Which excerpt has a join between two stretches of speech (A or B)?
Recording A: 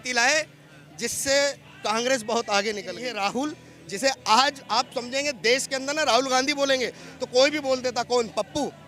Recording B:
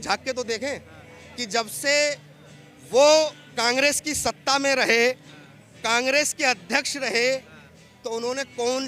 A